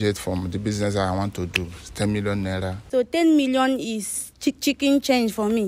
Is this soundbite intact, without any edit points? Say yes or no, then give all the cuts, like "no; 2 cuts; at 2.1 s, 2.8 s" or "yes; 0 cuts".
no; 1 cut; at 2.8 s